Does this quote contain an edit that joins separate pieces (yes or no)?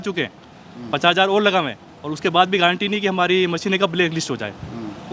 no